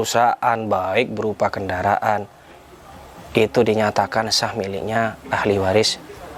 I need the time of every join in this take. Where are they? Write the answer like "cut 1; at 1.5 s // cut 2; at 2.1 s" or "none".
none